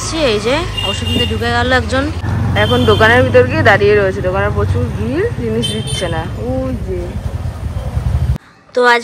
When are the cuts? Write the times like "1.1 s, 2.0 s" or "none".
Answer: 2.2 s, 8.3 s